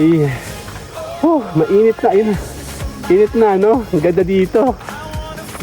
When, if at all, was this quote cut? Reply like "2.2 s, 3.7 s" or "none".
none